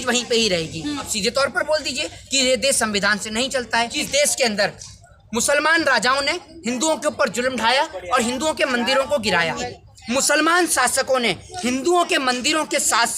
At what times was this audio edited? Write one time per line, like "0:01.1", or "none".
0:01.1
0:04.0
0:09.7